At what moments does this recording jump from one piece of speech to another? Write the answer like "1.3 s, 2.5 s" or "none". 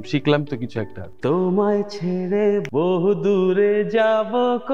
1.0 s, 2.7 s

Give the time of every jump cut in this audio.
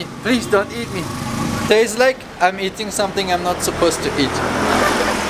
1.6 s

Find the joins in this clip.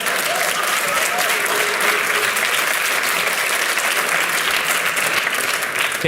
none

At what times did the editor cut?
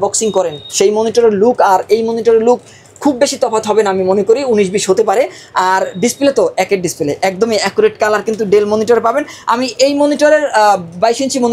none

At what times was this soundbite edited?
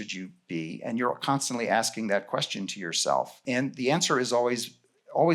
3.4 s

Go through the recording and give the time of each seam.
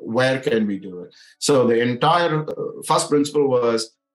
2.5 s

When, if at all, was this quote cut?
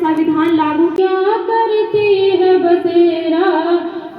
1.0 s

